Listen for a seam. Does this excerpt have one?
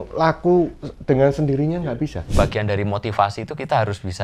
yes; 1 cut; at 2.2 s

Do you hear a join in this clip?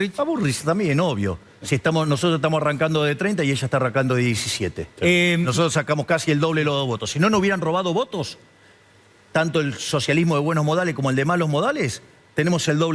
no; 0 cuts

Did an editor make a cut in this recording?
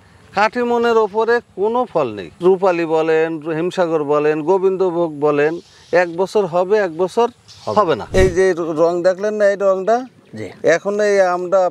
yes; 2 cuts; at 2.3 s, 8.1 s

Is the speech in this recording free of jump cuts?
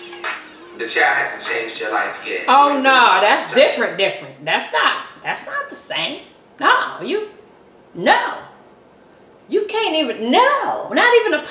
yes; 0 cuts

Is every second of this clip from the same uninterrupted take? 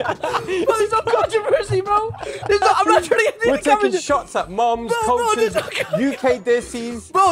yes; 0 cuts

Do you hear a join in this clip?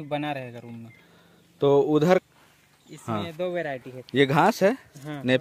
yes; 1 cut; at 2.2 s

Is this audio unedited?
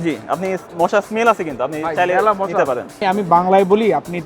no; 1 cut; at 3.0 s

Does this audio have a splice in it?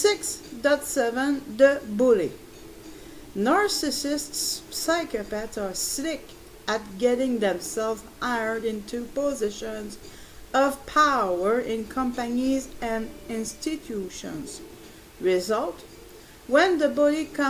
no; 0 cuts

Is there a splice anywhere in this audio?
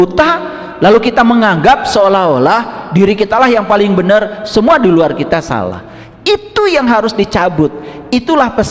no; 0 cuts

